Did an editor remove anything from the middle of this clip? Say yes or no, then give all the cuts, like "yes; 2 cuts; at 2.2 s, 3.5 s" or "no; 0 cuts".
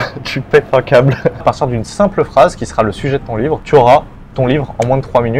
yes; 2 cuts; at 1.4 s, 3.6 s